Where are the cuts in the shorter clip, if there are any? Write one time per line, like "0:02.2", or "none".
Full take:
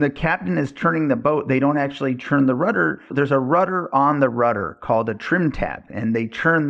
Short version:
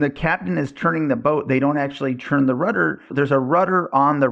none